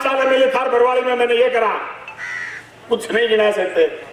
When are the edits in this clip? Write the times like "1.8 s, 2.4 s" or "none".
none